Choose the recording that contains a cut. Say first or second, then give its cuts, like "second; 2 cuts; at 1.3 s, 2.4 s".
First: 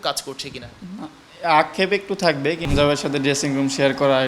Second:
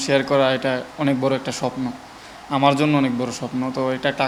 first; 1 cut; at 2.6 s